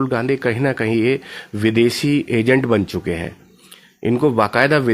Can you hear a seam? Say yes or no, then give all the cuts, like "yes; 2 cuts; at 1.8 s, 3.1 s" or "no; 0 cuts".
no; 0 cuts